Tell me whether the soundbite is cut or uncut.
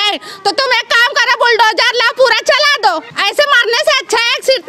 cut